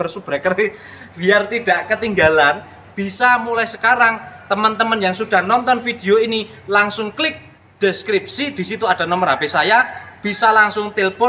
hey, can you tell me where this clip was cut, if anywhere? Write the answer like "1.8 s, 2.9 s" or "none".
none